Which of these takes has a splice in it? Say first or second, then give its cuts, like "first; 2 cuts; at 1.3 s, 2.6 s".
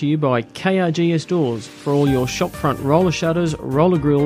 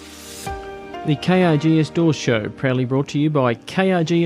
second; 1 cut; at 1.0 s